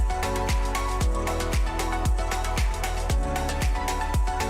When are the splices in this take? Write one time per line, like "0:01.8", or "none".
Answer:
none